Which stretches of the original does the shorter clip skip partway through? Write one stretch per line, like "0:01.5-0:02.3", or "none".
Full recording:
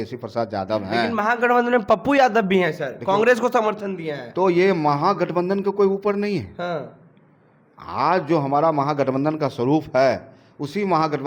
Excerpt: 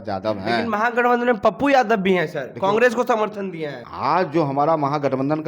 0:04.2-0:07.7